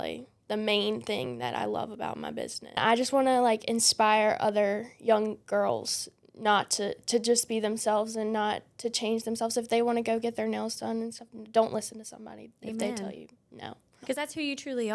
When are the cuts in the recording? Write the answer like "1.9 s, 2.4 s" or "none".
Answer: 2.8 s, 14.0 s